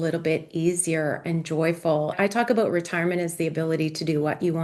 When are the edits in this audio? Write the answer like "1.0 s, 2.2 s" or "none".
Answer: 2.2 s